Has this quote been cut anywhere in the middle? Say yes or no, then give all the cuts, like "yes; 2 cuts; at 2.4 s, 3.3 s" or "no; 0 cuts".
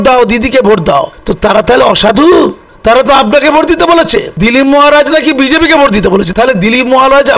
yes; 4 cuts; at 1.2 s, 2.7 s, 4.3 s, 6.3 s